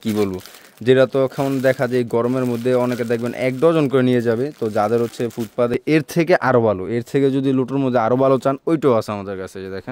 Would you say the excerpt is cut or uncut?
cut